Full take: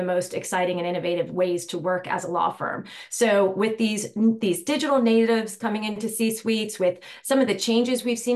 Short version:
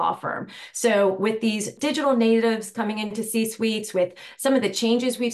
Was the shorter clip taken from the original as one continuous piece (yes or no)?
no